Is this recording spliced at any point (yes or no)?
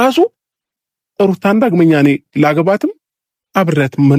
no